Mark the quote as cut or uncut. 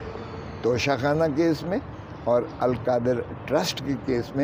uncut